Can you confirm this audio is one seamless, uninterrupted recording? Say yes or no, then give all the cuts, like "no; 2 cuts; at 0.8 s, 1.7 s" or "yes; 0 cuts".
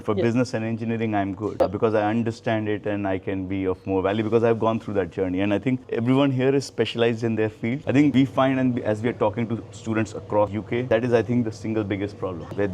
no; 1 cut; at 7.8 s